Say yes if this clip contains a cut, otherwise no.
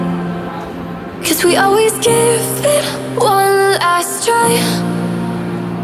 no